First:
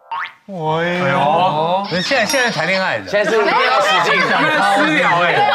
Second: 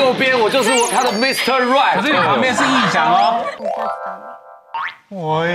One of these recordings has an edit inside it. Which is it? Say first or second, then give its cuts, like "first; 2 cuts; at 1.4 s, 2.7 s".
second; 1 cut; at 3.5 s